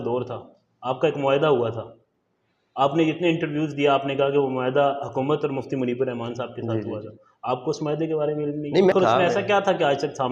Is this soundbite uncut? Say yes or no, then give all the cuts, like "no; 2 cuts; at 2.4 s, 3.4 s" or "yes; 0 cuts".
no; 1 cut; at 8.9 s